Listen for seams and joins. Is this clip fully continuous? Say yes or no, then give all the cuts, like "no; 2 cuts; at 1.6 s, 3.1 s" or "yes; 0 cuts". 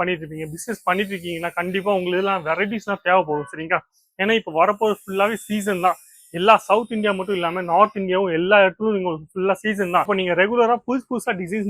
yes; 0 cuts